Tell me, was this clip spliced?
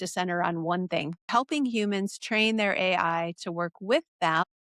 yes; 1 cut; at 1.3 s

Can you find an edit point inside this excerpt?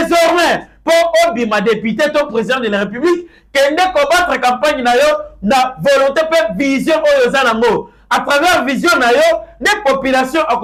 no; 0 cuts

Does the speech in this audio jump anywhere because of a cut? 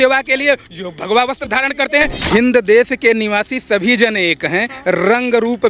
yes; 1 cut; at 2.2 s

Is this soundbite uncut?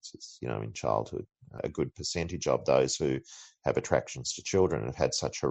no; 1 cut; at 1.6 s

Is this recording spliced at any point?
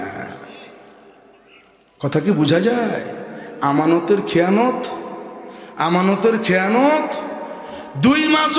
no; 0 cuts

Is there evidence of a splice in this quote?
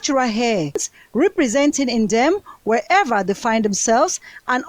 yes; 1 cut; at 0.9 s

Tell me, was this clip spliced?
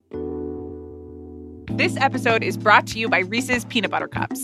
no; 0 cuts

